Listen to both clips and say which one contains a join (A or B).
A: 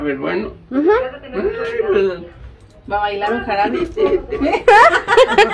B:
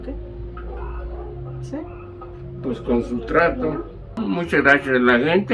B